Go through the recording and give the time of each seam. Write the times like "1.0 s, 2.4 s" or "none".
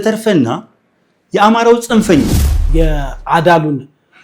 2.6 s